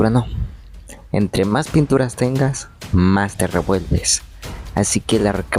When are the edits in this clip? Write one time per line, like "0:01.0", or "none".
none